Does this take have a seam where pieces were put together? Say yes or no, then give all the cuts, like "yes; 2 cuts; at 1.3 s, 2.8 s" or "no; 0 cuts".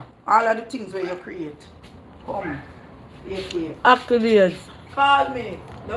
no; 0 cuts